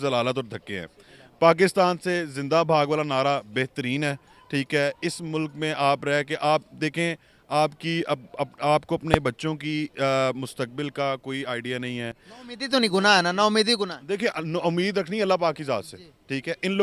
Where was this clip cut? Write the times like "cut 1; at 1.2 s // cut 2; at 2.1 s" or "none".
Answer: none